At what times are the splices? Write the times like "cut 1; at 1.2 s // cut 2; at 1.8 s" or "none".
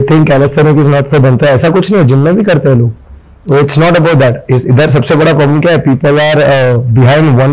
none